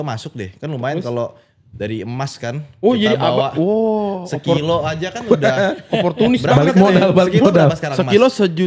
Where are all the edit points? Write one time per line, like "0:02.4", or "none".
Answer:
none